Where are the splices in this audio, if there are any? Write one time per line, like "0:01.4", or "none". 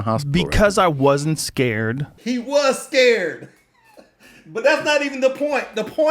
0:02.1